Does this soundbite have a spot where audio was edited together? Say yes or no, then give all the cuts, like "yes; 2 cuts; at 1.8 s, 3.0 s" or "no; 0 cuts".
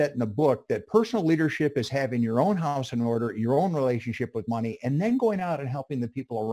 no; 0 cuts